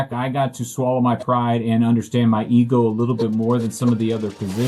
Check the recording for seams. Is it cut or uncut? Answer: uncut